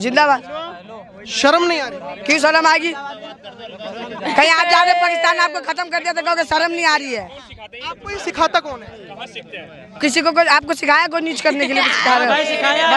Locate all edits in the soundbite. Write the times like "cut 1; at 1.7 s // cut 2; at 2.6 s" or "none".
none